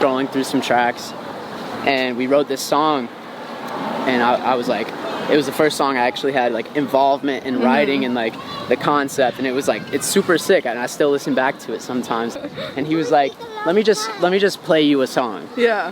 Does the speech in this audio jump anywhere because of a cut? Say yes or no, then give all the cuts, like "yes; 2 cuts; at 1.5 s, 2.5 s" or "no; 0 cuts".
yes; 1 cut; at 12.3 s